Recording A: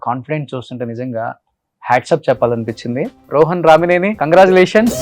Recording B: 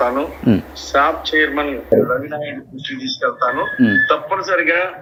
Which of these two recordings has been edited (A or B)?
A